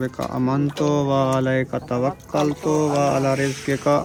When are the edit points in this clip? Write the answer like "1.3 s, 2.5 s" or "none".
none